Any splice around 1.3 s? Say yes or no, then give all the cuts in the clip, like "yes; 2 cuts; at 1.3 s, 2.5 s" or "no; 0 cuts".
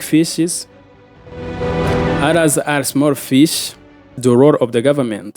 no; 1 cut; at 4.1 s